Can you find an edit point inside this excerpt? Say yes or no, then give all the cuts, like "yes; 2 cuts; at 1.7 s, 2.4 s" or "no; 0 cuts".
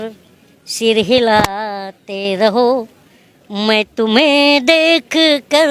no; 0 cuts